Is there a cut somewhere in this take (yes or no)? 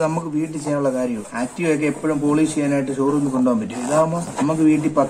yes